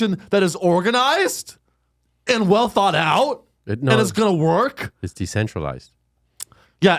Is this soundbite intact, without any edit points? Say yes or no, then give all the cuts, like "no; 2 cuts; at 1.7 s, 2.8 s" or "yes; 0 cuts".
yes; 0 cuts